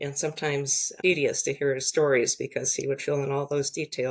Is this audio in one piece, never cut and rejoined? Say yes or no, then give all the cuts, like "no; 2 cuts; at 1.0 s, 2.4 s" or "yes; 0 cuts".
no; 1 cut; at 0.9 s